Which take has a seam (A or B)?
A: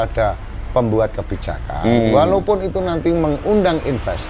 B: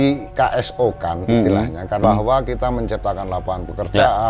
B